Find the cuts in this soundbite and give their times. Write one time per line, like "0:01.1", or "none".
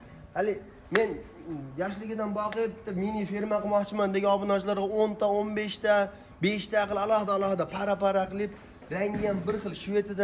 none